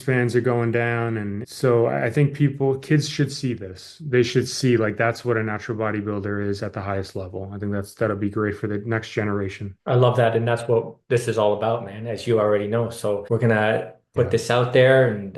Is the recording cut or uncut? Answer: uncut